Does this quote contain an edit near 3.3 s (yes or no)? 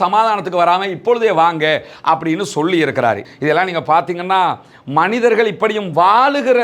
yes